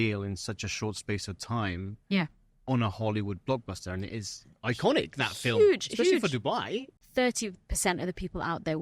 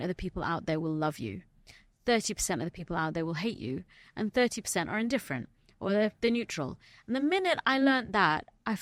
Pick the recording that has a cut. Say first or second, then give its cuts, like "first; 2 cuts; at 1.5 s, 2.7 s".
first; 1 cut; at 6.9 s